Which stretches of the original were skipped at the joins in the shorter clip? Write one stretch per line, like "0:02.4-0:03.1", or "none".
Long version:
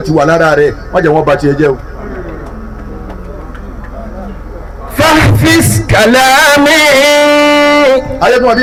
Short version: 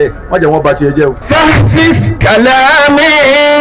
0:01.8-0:04.9